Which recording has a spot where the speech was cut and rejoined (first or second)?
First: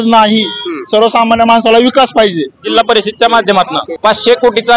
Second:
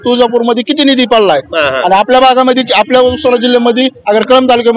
first